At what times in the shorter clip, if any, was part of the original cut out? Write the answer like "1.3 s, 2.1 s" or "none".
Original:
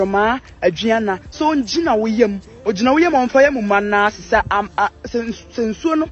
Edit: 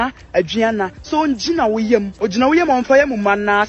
2.1 s